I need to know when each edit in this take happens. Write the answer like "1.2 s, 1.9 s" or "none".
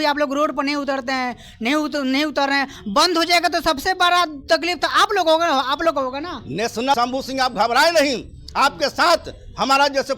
6.9 s